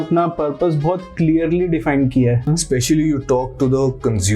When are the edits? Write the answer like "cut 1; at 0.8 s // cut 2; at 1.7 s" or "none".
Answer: cut 1; at 2.5 s

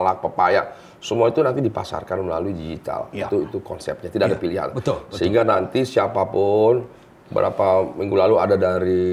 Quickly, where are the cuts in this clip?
none

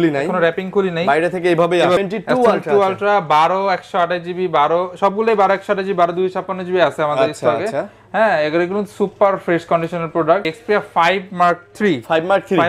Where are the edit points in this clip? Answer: cut 1; at 2.0 s // cut 2; at 10.5 s

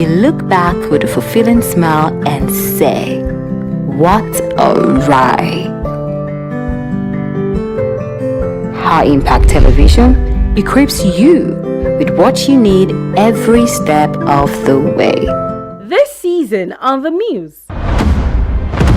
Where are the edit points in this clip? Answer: cut 1; at 15.8 s

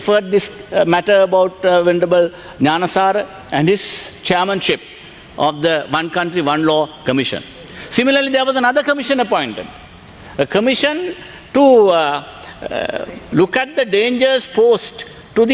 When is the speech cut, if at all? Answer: none

